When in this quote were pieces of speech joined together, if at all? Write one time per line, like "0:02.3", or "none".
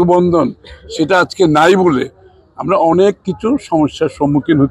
none